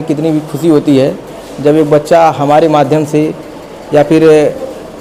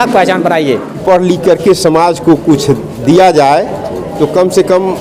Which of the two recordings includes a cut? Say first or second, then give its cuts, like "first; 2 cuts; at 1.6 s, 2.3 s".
second; 1 cut; at 0.9 s